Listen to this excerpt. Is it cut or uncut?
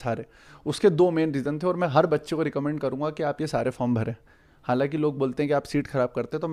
uncut